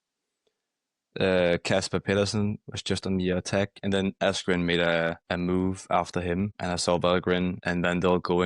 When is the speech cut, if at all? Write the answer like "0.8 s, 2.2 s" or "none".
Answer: 4.2 s, 5.2 s, 6.6 s, 7.6 s

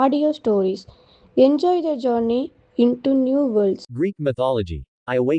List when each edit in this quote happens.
3.9 s

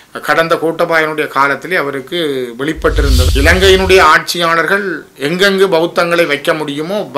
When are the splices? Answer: 3.3 s

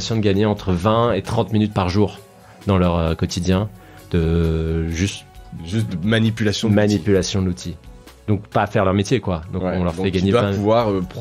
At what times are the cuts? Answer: none

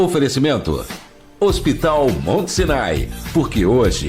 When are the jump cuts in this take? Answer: 2.3 s

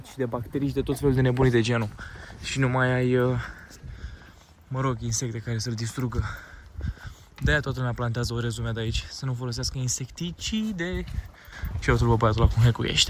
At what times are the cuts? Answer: none

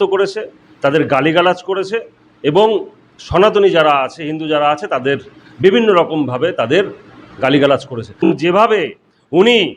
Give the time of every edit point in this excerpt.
8.3 s

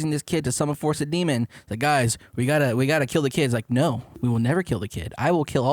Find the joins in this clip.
4.1 s

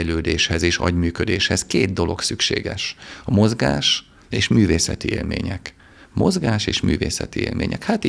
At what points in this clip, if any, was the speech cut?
none

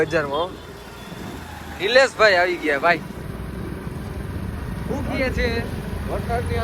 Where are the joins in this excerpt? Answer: none

